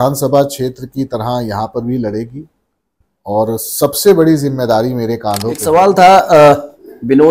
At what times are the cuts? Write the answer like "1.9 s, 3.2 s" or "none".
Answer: 5.6 s